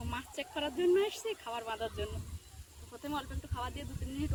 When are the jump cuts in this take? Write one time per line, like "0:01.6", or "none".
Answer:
none

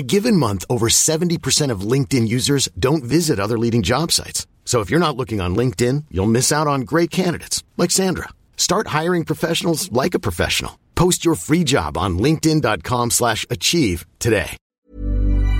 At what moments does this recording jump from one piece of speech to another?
0:14.6

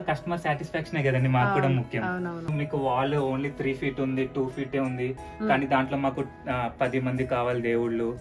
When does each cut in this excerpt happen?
0:02.4

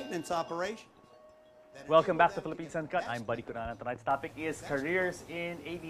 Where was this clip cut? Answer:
none

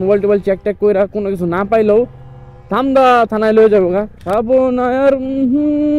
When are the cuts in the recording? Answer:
0:04.2

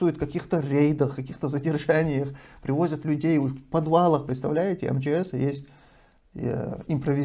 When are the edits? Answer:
none

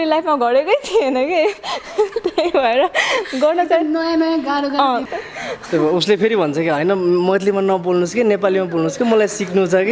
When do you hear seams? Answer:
0:05.1

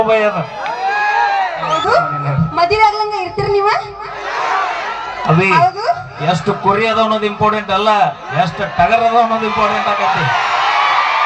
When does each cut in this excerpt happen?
0:01.7

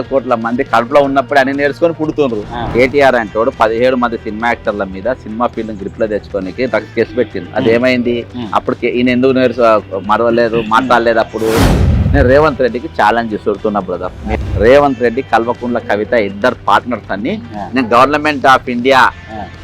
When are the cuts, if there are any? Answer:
0:02.6
0:12.0
0:14.2

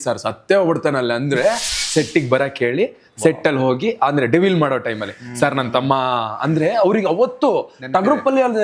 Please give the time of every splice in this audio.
0:01.8

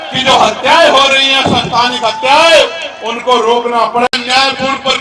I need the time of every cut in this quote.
0:04.1

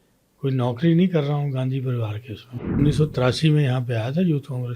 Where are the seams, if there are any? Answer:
0:02.8

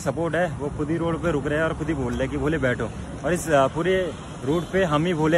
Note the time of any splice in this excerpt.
none

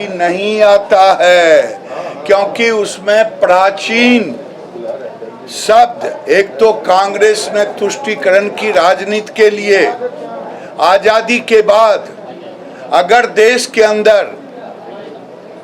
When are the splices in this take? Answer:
none

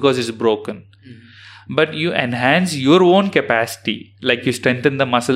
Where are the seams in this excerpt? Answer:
none

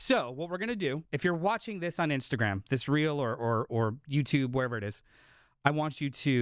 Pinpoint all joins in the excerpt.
0:01.1

